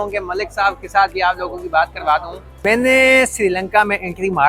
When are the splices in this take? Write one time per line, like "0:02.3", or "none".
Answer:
0:02.4